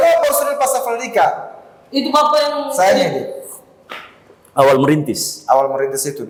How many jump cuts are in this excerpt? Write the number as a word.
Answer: zero